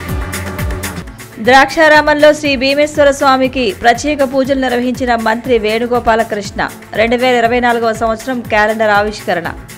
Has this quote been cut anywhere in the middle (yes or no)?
yes